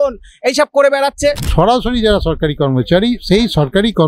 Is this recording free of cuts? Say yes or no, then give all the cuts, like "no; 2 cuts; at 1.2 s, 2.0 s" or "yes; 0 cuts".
no; 1 cut; at 1.4 s